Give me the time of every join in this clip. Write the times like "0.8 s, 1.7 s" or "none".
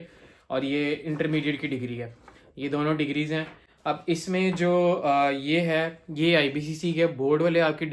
none